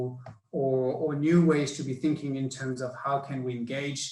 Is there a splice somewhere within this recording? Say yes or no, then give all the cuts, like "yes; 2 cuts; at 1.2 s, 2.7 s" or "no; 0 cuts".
no; 0 cuts